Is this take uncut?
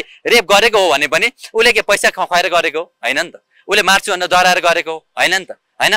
yes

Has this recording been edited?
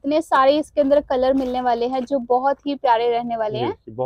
no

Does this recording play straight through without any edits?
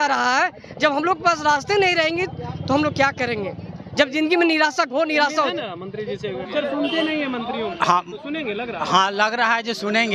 no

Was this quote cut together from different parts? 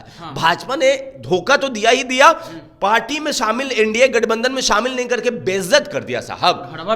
no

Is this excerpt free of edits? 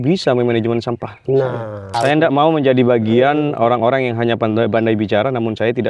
no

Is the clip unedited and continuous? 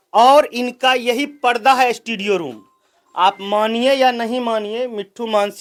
yes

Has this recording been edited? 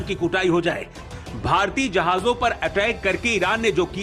no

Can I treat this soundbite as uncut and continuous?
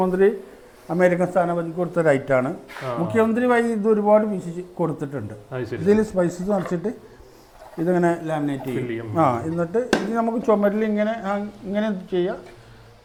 yes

